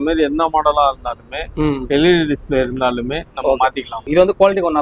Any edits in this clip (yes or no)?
yes